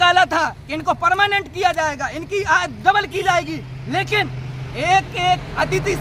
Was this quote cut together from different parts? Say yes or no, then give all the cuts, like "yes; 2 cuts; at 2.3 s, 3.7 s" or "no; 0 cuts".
no; 0 cuts